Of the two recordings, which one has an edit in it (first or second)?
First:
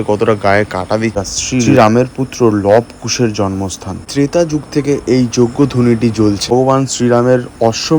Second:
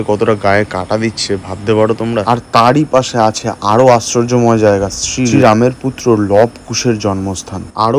first